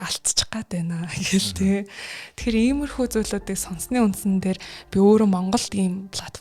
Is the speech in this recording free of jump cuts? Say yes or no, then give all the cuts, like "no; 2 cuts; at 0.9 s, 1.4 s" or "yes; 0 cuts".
yes; 0 cuts